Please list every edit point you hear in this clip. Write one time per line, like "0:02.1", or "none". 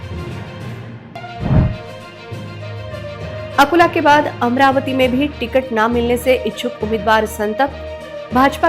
0:01.0